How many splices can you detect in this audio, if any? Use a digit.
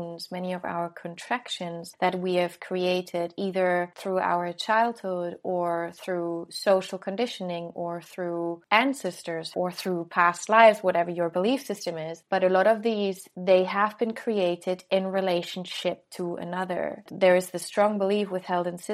6